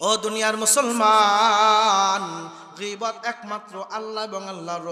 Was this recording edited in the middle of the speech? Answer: no; 0 cuts

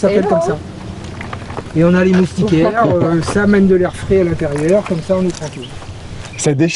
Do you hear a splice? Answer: no; 0 cuts

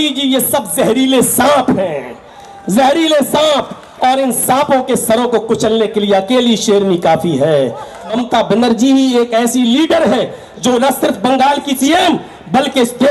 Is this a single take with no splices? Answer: no; 2 cuts; at 8.1 s, 11.8 s

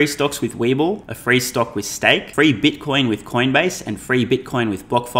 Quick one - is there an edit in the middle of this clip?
yes; 2 cuts; at 1.1 s, 2.3 s

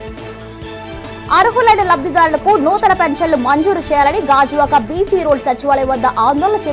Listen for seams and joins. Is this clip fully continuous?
no; 1 cut; at 1.0 s

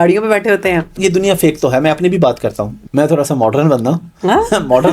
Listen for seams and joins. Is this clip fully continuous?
no; 2 cuts; at 1.0 s, 2.7 s

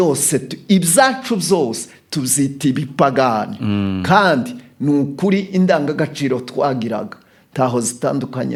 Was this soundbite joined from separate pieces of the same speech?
no; 0 cuts

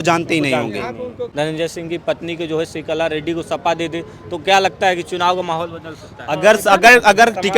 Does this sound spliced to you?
yes; 1 cut; at 1.2 s

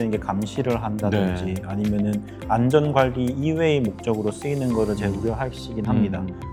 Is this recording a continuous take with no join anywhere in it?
yes; 0 cuts

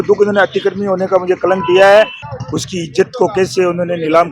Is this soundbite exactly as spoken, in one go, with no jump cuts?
no; 1 cut; at 2.2 s

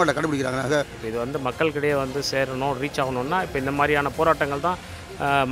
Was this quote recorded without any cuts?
no; 1 cut; at 1.0 s

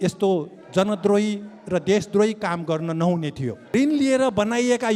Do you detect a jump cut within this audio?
yes; 1 cut; at 3.6 s

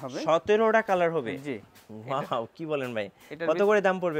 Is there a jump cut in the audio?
no; 0 cuts

